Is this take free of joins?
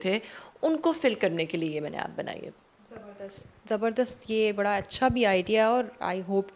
yes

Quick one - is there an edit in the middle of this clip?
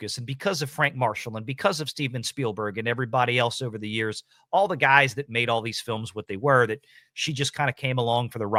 no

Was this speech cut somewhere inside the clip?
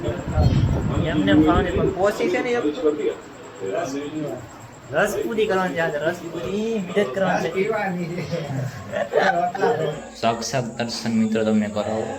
yes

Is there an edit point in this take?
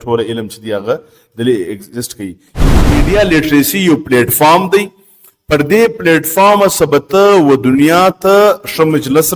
yes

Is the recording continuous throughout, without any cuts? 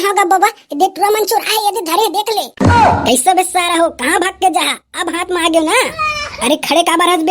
no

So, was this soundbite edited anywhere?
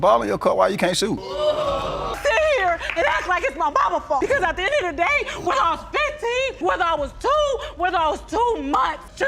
yes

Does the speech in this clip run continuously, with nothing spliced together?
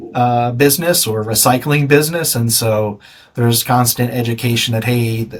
yes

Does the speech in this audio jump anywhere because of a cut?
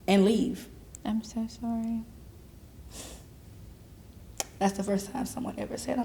yes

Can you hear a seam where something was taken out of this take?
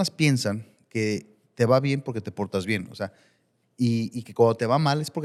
no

